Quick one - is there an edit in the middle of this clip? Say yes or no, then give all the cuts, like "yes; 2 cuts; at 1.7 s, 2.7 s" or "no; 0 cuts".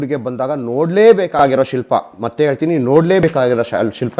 no; 0 cuts